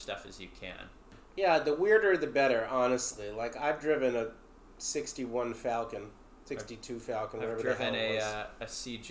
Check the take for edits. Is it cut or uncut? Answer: cut